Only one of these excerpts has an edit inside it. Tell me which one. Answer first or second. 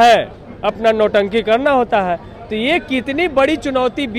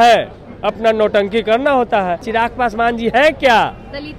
second